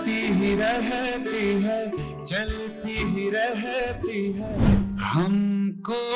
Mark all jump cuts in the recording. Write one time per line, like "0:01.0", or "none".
0:04.7